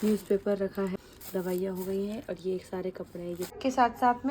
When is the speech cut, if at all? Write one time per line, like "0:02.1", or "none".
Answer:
0:00.9
0:03.5